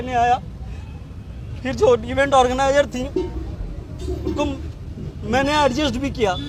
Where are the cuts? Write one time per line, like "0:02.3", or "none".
none

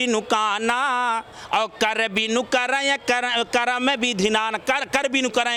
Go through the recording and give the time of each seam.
none

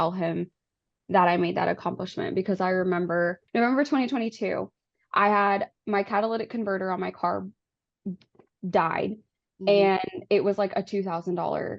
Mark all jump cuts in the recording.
none

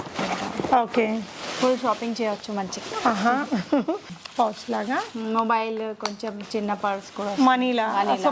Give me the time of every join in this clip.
0:04.1

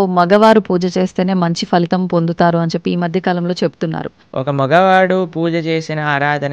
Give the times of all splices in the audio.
0:04.2

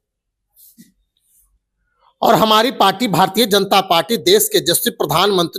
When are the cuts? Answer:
none

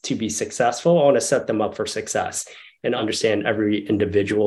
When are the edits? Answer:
0:03.0

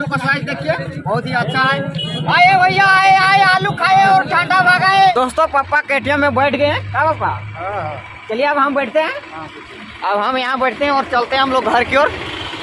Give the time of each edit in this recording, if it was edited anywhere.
0:05.1

